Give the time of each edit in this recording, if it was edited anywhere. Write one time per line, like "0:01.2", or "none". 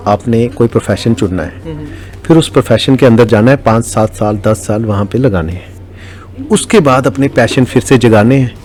none